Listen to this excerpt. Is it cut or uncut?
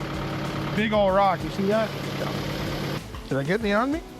cut